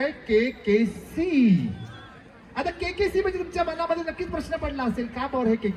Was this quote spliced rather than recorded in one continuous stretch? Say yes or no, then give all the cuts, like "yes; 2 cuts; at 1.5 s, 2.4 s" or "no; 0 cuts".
no; 0 cuts